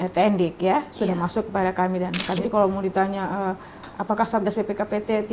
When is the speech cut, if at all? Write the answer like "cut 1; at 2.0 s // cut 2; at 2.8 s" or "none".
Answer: cut 1; at 2.4 s // cut 2; at 3.9 s